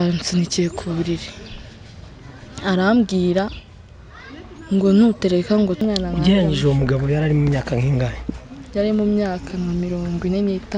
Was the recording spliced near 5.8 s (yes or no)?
yes